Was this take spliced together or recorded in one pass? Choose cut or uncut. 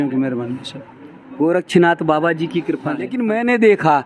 cut